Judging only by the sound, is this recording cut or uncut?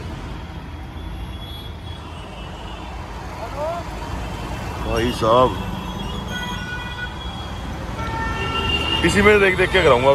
uncut